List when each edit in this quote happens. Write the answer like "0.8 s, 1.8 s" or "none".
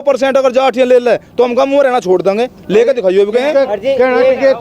none